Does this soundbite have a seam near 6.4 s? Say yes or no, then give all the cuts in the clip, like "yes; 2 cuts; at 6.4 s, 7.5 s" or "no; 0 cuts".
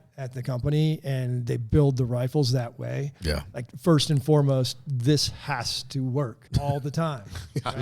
yes; 1 cut; at 6.4 s